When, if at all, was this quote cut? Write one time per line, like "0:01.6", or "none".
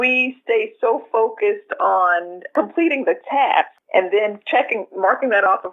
0:02.4
0:03.8